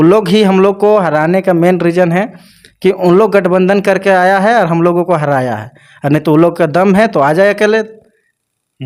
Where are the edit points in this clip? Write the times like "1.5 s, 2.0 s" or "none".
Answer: none